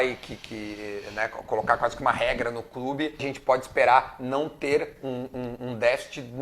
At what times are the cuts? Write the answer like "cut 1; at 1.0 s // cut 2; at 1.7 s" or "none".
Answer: cut 1; at 3.3 s